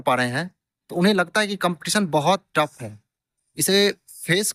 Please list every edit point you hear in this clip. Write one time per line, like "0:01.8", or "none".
none